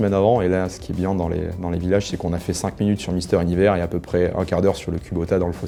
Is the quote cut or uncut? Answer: uncut